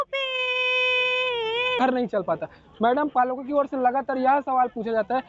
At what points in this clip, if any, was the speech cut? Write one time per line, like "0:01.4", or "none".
0:01.8